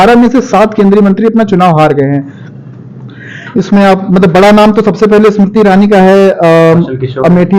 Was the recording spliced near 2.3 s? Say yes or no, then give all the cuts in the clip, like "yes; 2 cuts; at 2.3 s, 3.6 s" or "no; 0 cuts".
no; 0 cuts